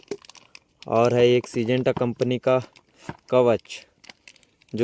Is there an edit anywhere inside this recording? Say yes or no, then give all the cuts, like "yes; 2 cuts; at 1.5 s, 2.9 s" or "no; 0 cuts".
no; 0 cuts